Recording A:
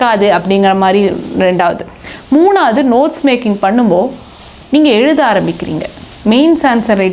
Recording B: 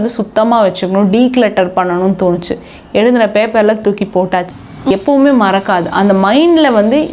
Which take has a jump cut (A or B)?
B